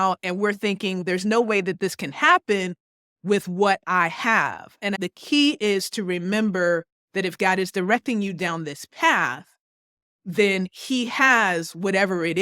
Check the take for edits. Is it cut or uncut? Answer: cut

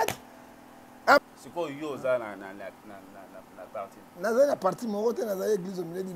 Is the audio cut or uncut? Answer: cut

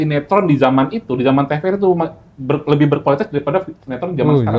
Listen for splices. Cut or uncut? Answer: uncut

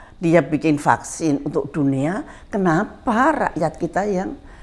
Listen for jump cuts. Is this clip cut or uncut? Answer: uncut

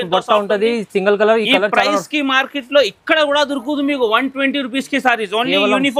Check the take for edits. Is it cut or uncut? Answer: uncut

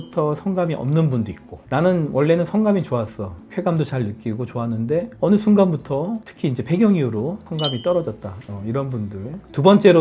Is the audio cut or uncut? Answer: uncut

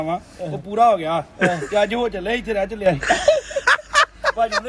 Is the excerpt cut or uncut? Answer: uncut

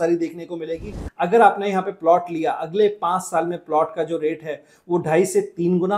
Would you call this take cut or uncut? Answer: cut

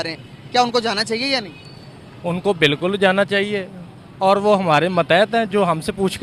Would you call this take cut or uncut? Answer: uncut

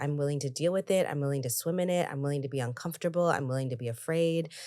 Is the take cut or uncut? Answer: uncut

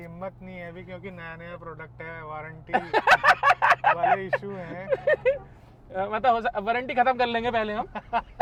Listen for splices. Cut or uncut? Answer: uncut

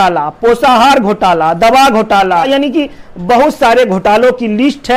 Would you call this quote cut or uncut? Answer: uncut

